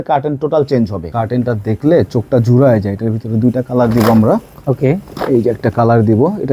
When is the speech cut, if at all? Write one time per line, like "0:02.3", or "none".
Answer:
0:01.0